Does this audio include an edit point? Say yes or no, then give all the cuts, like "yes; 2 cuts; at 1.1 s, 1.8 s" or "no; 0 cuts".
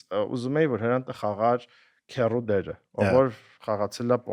no; 0 cuts